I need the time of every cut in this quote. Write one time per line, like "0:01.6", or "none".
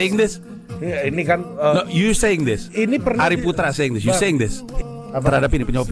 0:04.6

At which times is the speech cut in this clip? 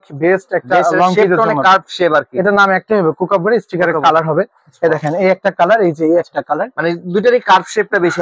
none

